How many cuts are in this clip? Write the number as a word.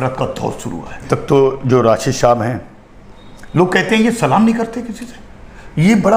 one